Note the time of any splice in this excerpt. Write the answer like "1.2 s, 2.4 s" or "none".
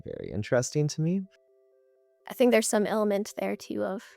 1.7 s